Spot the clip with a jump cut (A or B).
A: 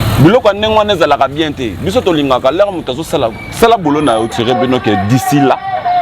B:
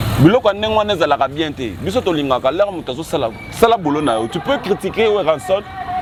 A